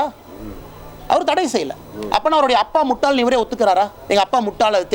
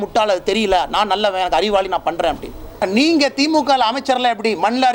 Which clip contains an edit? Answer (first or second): second